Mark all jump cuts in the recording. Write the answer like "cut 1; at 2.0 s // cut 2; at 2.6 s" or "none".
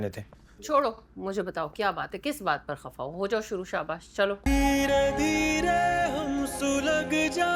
cut 1; at 4.4 s